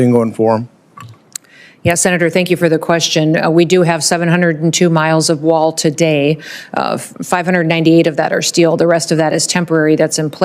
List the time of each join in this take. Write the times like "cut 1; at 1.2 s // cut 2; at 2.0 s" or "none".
none